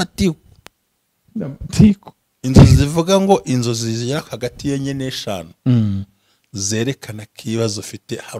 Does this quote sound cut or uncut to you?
uncut